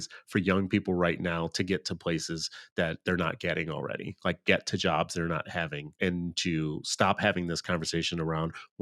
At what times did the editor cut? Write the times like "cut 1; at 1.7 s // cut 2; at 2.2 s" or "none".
cut 1; at 5.9 s